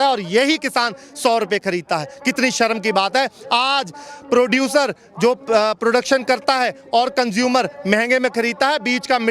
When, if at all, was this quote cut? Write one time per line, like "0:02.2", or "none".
none